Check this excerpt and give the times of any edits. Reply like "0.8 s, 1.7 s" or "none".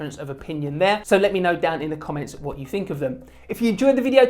1.0 s